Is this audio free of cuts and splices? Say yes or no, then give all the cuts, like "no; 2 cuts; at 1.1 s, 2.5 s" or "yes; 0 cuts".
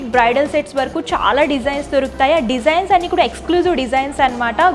yes; 0 cuts